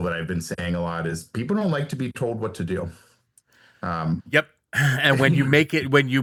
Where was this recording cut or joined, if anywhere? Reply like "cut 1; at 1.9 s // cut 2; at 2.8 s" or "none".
none